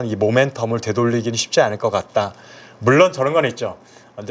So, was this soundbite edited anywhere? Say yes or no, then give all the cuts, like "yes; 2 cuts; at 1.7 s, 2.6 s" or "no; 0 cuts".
no; 0 cuts